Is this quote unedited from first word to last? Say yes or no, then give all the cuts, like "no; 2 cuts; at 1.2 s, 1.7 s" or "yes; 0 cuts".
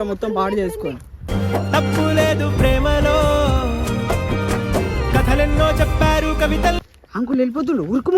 no; 2 cuts; at 6.0 s, 6.9 s